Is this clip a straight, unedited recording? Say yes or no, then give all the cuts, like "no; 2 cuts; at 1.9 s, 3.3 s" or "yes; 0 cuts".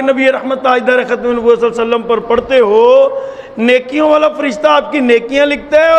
yes; 0 cuts